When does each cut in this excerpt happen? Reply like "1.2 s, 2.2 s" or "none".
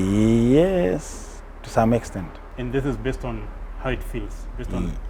2.4 s

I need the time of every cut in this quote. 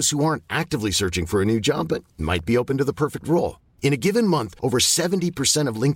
none

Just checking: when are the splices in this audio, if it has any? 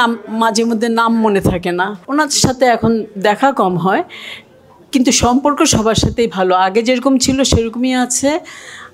2.0 s

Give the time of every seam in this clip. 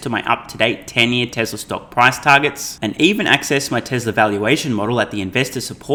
none

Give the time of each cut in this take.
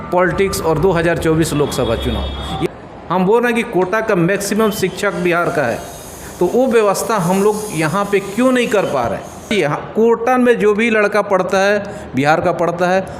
2.6 s, 9.5 s

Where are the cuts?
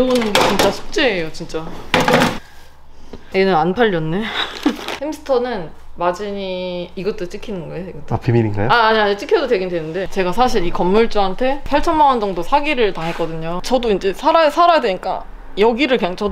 10.0 s, 13.5 s

